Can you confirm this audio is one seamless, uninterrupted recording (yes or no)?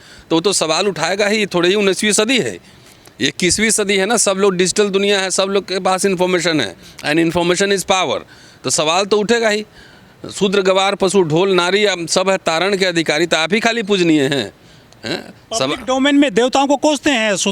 yes